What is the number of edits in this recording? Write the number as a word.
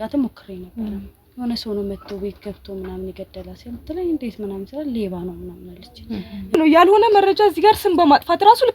one